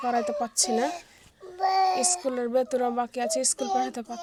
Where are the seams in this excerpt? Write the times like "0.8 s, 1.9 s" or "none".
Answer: none